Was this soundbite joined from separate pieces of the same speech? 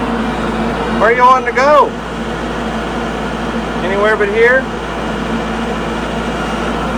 no; 0 cuts

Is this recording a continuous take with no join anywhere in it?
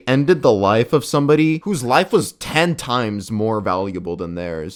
yes; 0 cuts

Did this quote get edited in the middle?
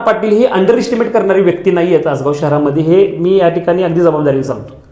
no; 0 cuts

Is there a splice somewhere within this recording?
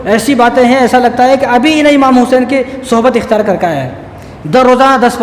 no; 0 cuts

